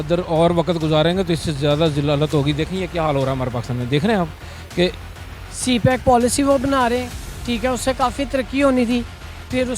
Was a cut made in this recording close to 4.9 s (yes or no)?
yes